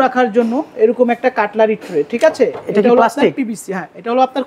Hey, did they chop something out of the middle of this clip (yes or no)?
no